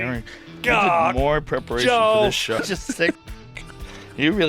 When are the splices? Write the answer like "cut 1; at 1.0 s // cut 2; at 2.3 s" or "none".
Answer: cut 1; at 2.6 s